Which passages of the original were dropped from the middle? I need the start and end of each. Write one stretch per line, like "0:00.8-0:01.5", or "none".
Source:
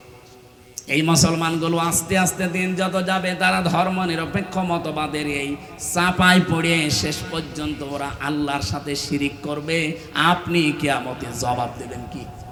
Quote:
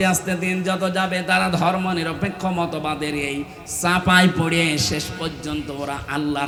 none